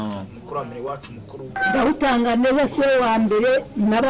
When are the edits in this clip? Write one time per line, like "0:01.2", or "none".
0:01.5